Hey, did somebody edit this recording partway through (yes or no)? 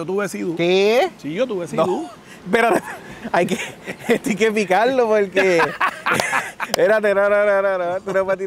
no